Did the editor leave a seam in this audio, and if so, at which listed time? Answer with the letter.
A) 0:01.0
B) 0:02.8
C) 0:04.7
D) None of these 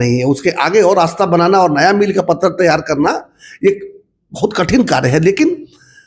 D